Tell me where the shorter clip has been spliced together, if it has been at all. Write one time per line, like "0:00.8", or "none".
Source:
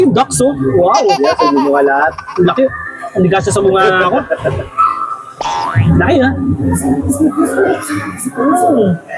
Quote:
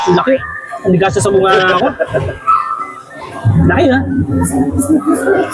none